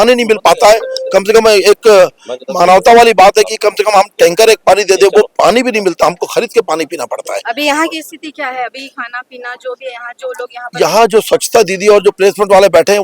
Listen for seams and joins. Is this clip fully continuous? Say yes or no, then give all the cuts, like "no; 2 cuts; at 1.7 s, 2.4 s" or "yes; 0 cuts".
yes; 0 cuts